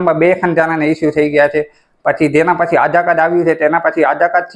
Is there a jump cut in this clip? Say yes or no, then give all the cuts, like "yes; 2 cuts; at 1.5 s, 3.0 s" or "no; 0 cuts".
no; 0 cuts